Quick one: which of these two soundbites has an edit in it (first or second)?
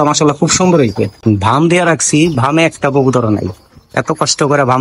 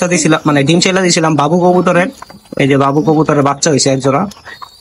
first